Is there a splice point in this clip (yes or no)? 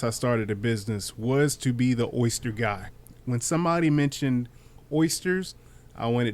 yes